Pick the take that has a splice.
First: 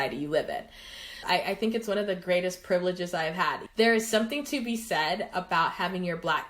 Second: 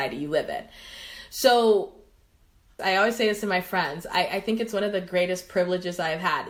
first; 2 cuts; at 1.1 s, 3.6 s

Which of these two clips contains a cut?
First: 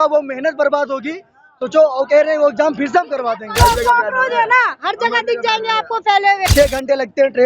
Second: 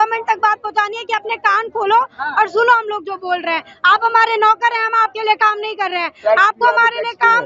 first; 2 cuts; at 3.5 s, 6.5 s

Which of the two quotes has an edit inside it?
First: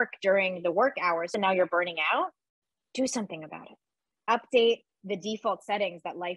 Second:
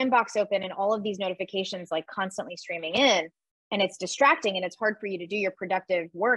first; 2 cuts; at 1.3 s, 4.1 s

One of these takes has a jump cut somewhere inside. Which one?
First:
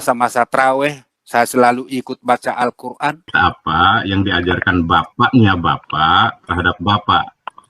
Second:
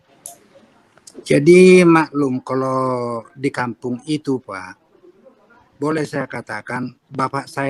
first; 1 cut; at 3.3 s

